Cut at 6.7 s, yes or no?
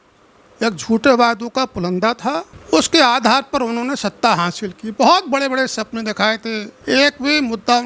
yes